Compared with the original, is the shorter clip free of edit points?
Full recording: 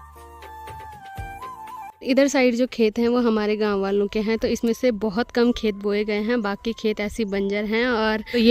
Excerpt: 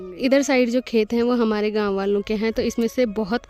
yes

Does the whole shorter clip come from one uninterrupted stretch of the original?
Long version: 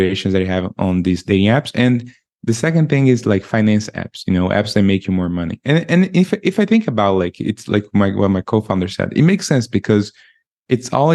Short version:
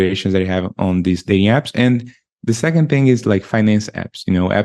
yes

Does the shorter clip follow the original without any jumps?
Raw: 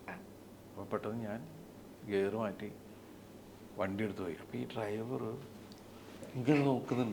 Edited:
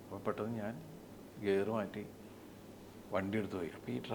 yes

